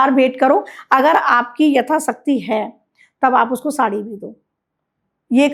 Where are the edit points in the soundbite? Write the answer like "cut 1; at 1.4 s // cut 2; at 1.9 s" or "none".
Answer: none

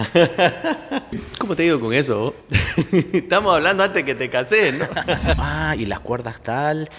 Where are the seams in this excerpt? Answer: cut 1; at 1.3 s // cut 2; at 5.4 s

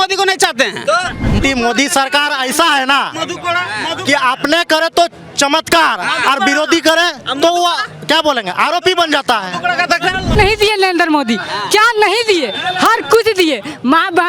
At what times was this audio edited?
cut 1; at 1.4 s // cut 2; at 10.3 s

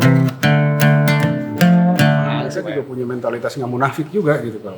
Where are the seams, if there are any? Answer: cut 1; at 2.4 s

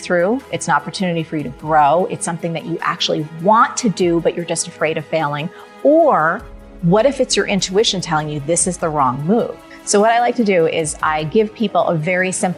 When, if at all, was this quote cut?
cut 1; at 9.7 s

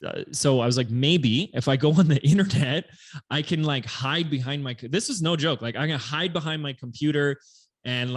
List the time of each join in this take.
none

